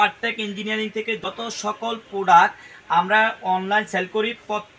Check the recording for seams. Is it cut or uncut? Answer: cut